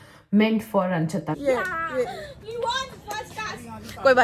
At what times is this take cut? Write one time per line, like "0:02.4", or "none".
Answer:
0:01.4